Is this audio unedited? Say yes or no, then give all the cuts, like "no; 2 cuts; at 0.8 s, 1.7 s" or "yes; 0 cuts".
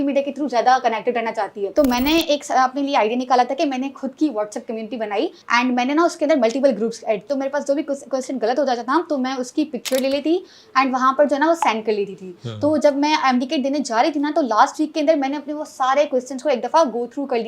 no; 3 cuts; at 1.6 s, 5.4 s, 7.2 s